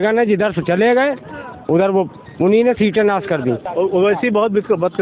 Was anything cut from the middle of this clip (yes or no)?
yes